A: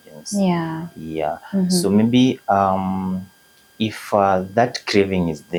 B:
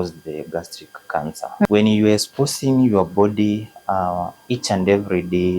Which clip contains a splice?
B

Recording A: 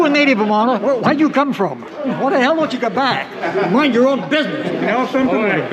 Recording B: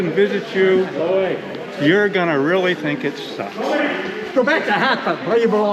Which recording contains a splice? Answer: A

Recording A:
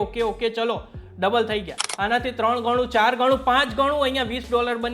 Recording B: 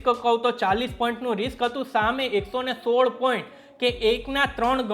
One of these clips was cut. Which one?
A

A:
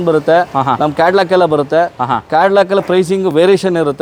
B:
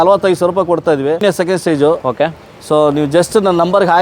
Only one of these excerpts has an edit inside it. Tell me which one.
B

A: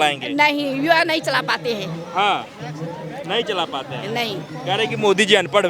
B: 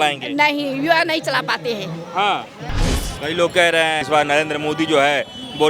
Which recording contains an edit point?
B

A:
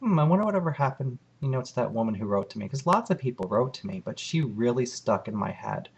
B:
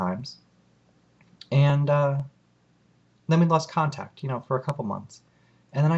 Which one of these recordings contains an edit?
A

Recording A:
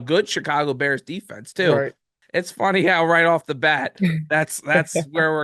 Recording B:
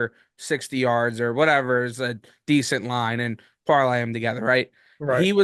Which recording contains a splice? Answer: A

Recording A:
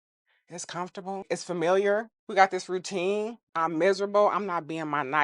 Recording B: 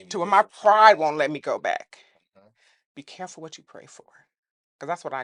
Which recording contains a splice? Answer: A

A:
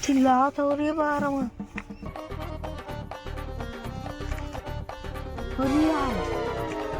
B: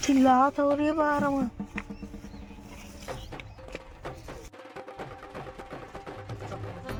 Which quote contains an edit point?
A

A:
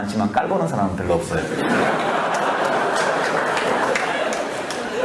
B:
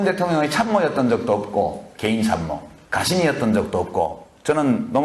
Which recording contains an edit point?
A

